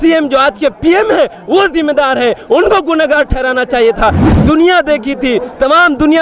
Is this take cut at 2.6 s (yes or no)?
no